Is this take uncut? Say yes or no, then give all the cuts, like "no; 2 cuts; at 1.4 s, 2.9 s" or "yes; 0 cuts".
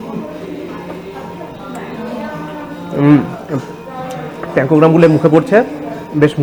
yes; 0 cuts